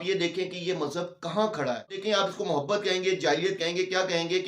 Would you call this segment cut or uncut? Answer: cut